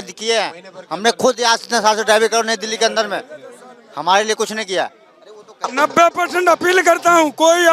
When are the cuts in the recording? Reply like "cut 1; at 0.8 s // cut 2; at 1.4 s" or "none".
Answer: cut 1; at 5.7 s